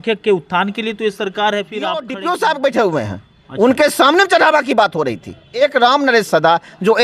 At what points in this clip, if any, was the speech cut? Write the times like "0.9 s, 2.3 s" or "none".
2.1 s, 5.5 s